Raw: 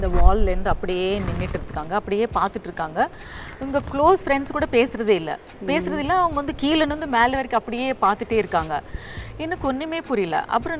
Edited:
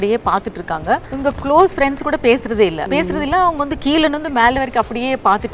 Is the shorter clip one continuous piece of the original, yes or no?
no